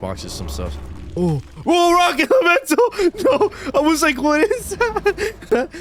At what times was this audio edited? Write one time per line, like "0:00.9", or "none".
none